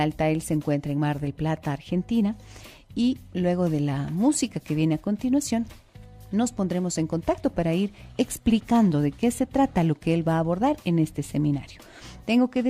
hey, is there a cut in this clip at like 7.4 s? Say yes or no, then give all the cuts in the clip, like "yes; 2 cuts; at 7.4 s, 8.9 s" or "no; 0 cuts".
yes; 1 cut; at 7.4 s